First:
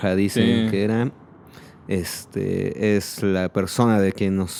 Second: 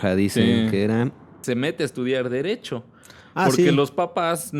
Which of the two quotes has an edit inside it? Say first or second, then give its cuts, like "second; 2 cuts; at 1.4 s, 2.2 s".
second; 1 cut; at 1.3 s